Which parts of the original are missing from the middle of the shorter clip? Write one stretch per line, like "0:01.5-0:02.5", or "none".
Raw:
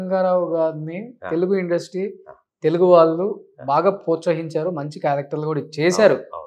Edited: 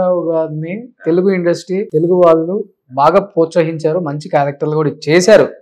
0:02.1-0:02.6